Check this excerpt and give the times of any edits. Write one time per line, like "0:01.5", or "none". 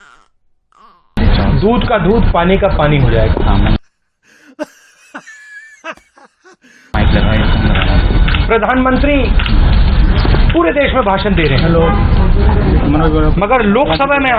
0:06.6

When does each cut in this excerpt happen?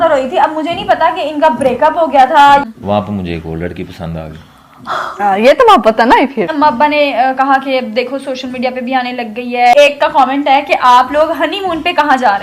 0:02.6
0:06.5
0:09.7

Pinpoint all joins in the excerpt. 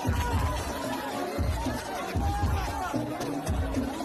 none

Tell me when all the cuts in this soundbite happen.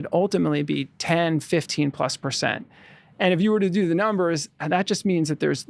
none

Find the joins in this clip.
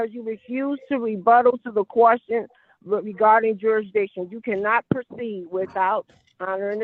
none

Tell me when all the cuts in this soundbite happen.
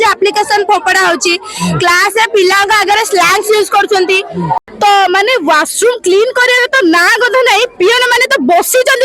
0:04.6

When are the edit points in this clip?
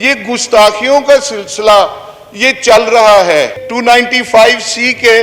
0:03.5

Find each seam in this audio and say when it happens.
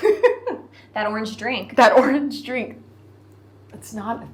none

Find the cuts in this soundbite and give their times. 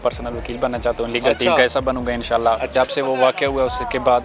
0:02.7

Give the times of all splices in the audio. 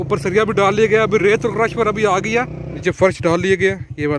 0:02.6

